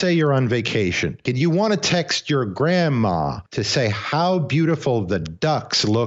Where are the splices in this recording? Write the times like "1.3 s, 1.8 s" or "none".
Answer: 1.2 s, 3.4 s